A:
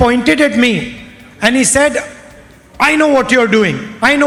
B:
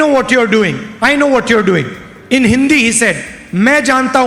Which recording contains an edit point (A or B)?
B